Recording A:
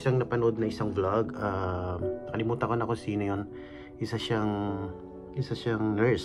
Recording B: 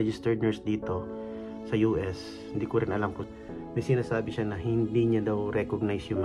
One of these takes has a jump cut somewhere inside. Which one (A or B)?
B